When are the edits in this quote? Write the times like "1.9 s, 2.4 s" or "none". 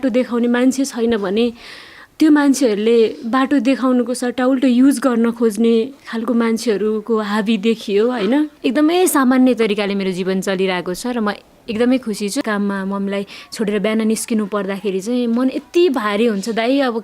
8.5 s, 12.4 s